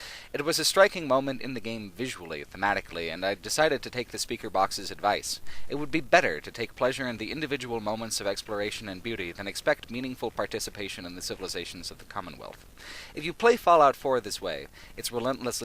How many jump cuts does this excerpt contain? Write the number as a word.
one